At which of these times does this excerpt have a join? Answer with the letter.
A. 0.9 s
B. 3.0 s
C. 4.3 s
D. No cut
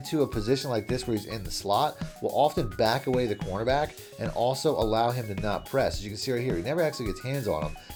D